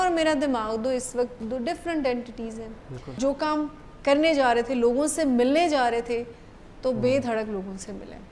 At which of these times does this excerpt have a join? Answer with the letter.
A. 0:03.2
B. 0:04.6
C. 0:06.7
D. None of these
A